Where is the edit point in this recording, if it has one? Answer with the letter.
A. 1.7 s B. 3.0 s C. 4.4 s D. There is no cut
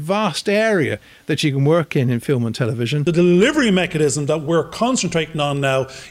B